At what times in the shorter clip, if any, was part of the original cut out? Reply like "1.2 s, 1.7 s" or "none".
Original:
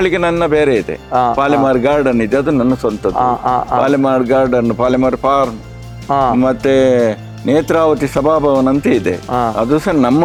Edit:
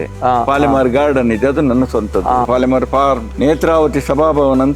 2.5 s, 3.3 s